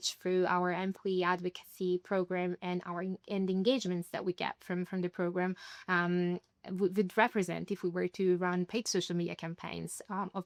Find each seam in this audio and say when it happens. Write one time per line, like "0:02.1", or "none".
none